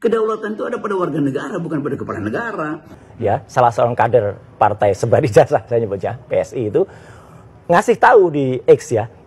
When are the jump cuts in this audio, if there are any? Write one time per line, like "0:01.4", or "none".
0:02.9